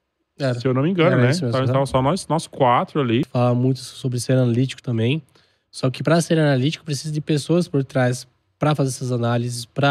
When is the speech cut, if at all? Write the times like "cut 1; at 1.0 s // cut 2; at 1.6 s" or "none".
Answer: cut 1; at 3.3 s